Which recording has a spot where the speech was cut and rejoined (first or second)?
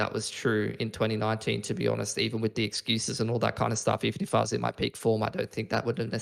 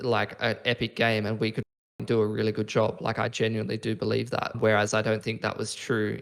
second